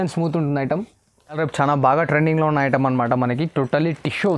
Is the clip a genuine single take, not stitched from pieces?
no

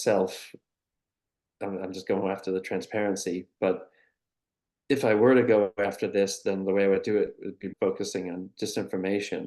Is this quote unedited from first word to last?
no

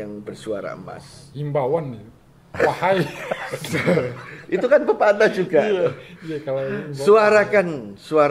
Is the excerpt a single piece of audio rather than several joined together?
yes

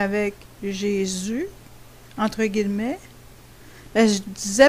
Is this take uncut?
no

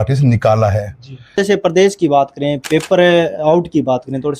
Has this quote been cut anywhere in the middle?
yes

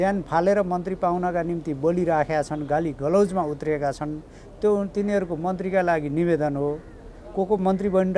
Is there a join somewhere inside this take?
no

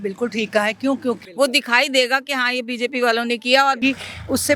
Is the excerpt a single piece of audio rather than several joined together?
no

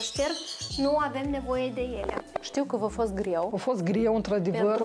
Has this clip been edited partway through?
yes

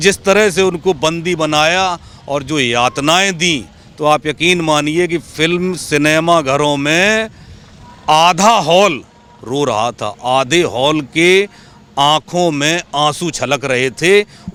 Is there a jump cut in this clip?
no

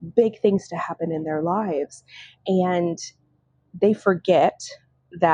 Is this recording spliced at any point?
no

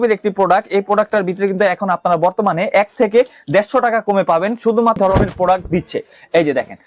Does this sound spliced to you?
yes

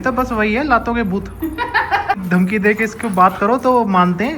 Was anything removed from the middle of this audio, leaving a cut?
yes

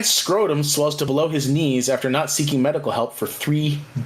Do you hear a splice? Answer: yes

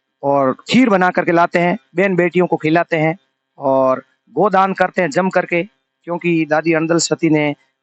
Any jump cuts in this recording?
no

